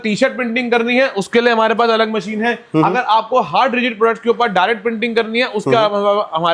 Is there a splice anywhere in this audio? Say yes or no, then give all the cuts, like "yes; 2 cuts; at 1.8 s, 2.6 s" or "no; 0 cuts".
no; 0 cuts